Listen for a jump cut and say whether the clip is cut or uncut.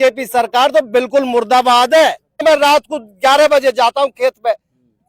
cut